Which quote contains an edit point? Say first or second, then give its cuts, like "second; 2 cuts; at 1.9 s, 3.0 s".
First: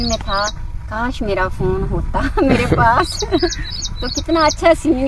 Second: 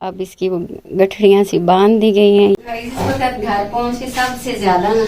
second; 1 cut; at 2.6 s